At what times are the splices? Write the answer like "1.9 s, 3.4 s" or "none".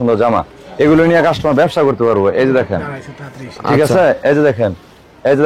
none